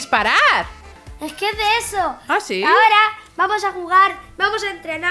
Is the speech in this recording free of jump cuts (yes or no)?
yes